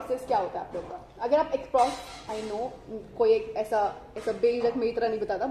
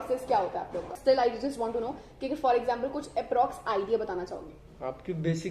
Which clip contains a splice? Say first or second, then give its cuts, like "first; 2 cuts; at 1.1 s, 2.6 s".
second; 1 cut; at 0.9 s